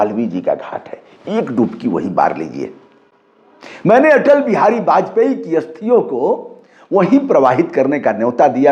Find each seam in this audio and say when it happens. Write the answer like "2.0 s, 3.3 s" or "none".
none

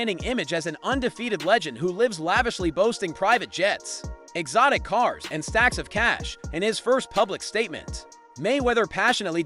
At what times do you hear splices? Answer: 6.3 s

